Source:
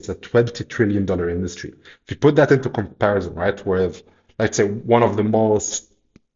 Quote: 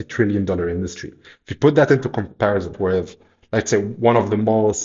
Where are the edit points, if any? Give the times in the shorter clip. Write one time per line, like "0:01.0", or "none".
0:02.7